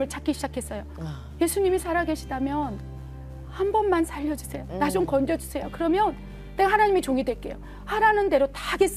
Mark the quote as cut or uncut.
uncut